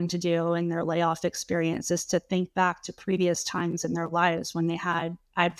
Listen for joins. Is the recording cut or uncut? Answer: uncut